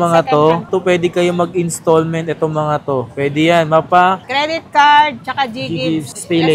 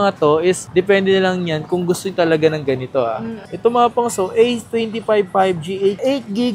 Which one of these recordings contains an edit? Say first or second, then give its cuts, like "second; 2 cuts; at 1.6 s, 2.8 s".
second; 1 cut; at 3.4 s